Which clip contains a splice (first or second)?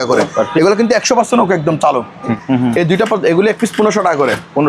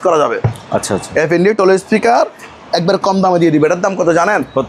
first